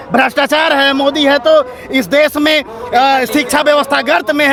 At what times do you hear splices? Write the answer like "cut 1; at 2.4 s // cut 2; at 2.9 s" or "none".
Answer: none